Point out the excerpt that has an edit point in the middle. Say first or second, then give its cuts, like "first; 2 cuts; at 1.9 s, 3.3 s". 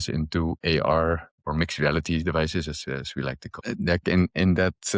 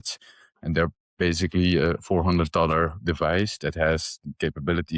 first; 1 cut; at 3.6 s